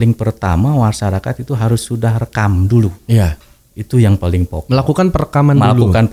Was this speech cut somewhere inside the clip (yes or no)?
no